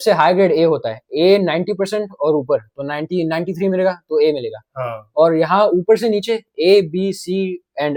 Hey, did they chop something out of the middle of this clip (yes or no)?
no